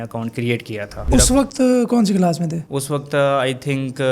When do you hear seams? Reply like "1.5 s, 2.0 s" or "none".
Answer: 1.1 s